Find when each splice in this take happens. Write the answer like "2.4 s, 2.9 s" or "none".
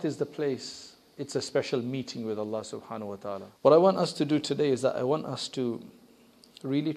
3.5 s